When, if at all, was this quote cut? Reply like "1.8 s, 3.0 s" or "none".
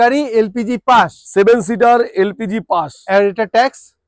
none